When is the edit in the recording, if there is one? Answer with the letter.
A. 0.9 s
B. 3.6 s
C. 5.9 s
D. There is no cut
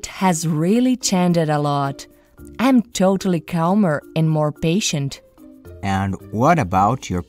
C